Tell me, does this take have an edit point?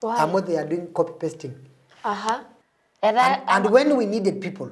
yes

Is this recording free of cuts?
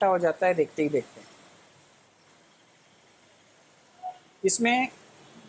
yes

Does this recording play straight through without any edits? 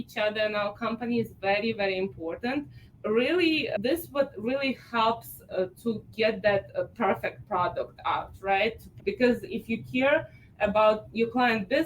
no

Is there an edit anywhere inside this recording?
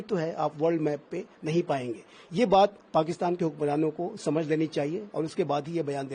no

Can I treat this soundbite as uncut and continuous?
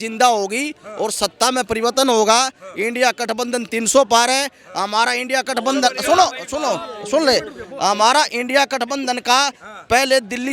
yes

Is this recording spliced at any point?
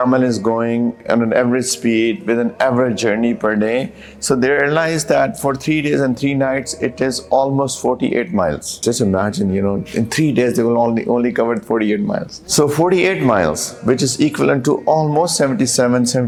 no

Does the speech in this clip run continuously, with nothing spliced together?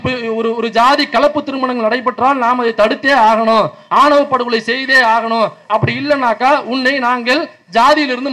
yes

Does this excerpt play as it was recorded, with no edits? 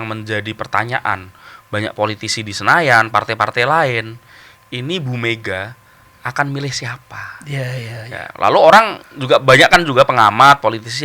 yes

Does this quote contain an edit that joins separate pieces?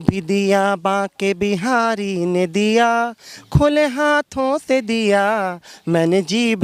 no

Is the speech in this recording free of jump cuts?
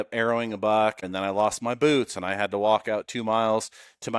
no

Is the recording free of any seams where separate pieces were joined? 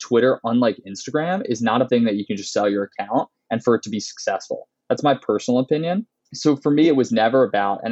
no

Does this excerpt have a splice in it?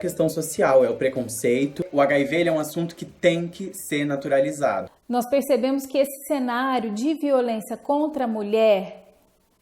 yes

